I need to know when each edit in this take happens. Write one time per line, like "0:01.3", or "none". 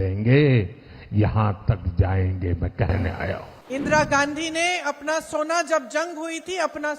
0:03.5